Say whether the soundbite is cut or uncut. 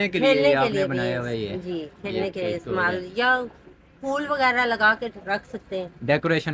uncut